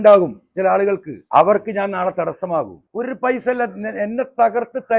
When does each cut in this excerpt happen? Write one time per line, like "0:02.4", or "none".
0:01.1
0:02.8